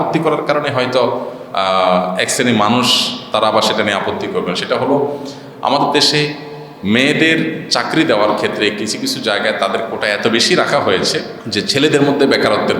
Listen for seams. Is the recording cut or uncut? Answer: cut